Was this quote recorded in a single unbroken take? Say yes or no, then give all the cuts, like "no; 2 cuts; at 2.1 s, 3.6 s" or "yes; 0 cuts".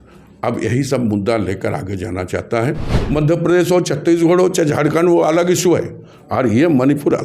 no; 1 cut; at 3.0 s